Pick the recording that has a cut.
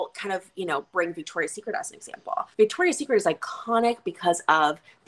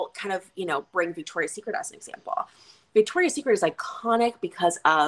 first; 1 cut; at 2.5 s

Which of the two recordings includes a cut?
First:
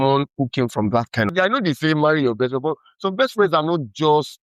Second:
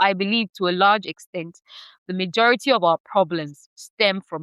first; 1 cut; at 1.3 s

